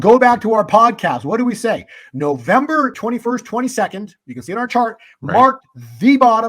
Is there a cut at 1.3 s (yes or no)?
no